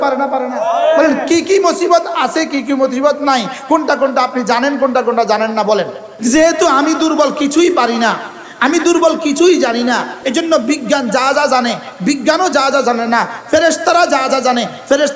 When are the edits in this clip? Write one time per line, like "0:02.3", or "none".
0:06.0
0:10.2